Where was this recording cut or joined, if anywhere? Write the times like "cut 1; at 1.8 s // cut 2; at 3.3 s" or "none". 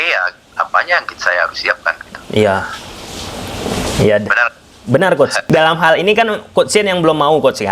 cut 1; at 5.5 s